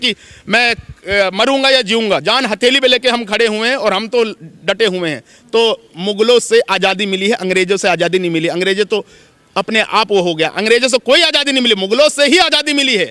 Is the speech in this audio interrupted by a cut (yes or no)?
no